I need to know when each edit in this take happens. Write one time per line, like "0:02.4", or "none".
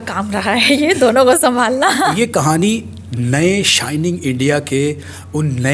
0:02.1